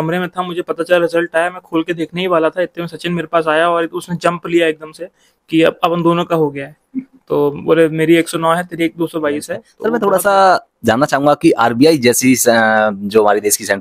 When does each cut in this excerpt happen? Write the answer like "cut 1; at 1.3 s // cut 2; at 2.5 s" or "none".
cut 1; at 9.6 s